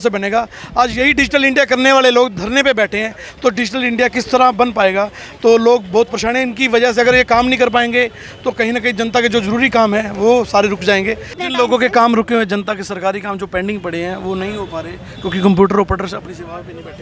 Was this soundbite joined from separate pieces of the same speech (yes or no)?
yes